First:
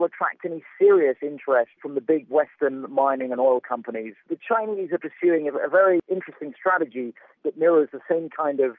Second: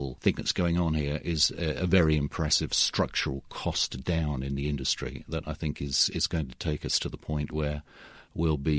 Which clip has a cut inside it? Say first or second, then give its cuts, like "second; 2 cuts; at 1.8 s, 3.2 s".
first; 3 cuts; at 4.1 s, 6.0 s, 7.3 s